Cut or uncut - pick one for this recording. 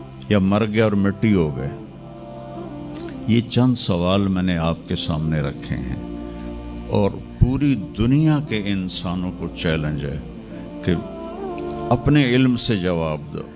uncut